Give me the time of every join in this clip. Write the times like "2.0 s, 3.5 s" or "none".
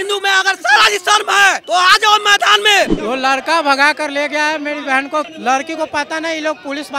3.0 s, 5.3 s

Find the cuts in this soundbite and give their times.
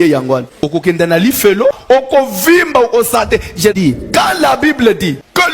3.7 s

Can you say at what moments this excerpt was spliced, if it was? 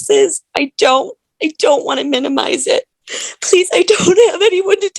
3.0 s

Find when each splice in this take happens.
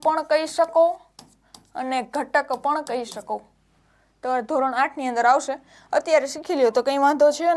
none

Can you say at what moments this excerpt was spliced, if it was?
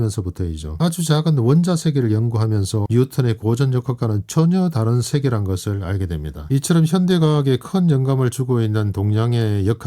6.3 s

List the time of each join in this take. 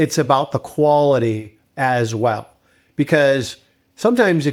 none

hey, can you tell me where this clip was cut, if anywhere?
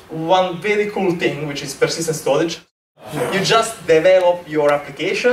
2.7 s

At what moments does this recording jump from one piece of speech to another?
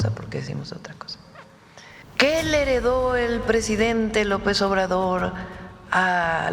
2.0 s

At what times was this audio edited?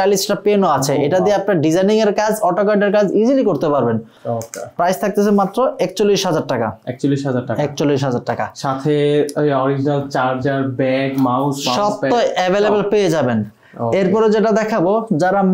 none

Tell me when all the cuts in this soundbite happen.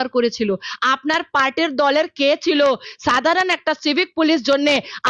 none

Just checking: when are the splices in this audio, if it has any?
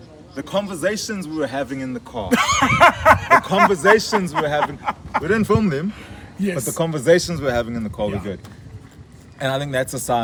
none

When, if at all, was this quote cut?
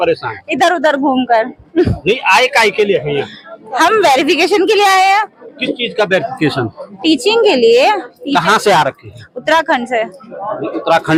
none

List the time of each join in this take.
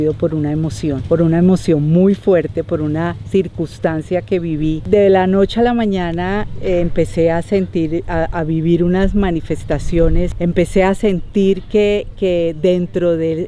1.0 s, 4.8 s, 10.3 s

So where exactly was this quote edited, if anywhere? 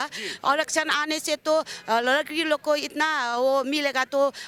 none

